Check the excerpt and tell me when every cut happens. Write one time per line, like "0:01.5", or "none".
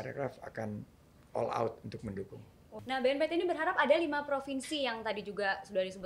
0:02.8